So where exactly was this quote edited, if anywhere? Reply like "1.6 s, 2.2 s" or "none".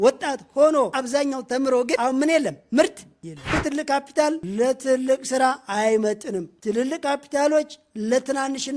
1.0 s, 2.0 s, 3.5 s